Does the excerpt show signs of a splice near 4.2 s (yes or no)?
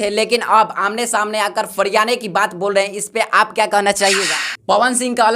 yes